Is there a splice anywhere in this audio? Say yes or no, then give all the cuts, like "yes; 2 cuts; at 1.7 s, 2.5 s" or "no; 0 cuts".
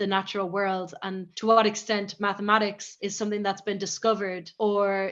yes; 1 cut; at 2.9 s